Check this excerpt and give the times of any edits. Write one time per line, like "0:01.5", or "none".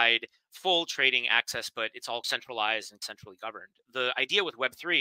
0:02.3